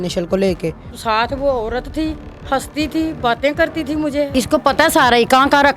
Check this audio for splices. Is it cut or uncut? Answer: cut